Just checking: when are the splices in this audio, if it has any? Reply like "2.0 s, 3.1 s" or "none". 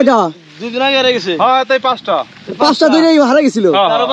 none